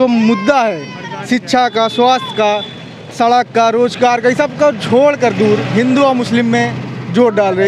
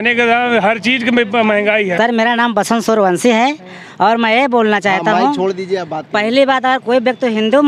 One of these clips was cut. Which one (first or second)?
second